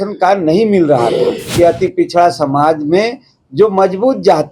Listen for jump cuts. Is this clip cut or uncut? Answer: cut